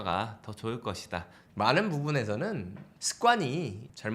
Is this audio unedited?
no; 1 cut; at 1.4 s

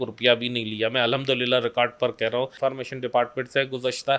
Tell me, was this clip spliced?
yes; 1 cut; at 2.5 s

